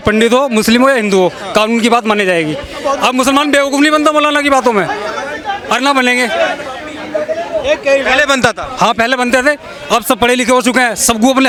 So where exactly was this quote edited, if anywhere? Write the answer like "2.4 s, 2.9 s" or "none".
none